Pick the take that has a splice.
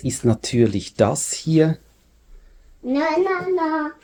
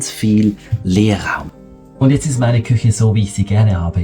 second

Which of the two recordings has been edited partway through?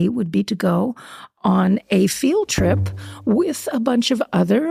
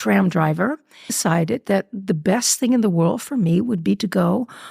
second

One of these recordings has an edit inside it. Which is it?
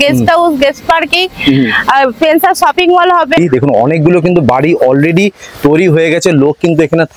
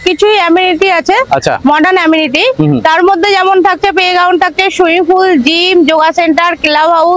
first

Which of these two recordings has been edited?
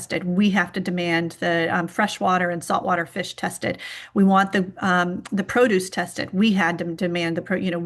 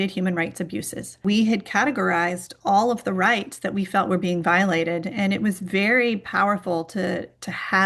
second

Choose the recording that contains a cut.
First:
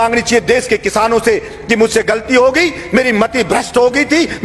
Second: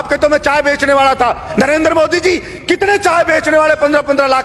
second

